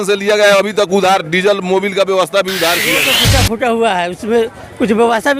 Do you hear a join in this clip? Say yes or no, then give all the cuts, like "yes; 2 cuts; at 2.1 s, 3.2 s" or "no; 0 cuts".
yes; 1 cut; at 3.2 s